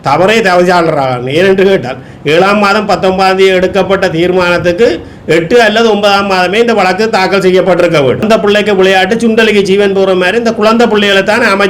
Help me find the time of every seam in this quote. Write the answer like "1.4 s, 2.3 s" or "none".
8.2 s